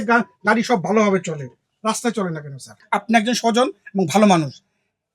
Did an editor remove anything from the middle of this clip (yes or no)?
yes